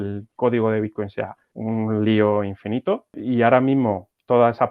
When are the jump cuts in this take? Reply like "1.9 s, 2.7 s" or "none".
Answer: 1.4 s, 3.2 s